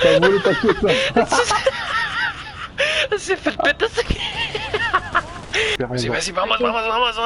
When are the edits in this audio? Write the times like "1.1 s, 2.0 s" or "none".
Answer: 5.7 s